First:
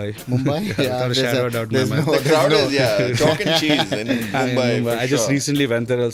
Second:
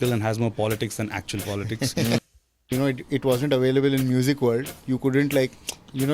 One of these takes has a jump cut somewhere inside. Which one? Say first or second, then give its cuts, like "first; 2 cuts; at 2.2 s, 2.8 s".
second; 1 cut; at 2.2 s